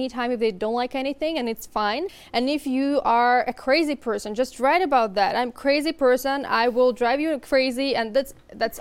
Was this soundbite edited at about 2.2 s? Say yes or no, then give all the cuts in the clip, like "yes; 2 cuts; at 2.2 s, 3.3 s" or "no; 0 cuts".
yes; 1 cut; at 2.2 s